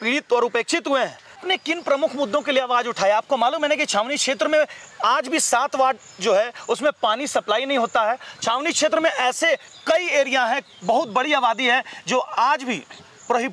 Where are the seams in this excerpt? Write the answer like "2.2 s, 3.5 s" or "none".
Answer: 1.4 s